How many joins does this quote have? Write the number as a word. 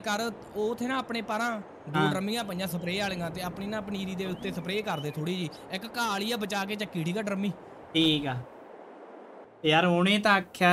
zero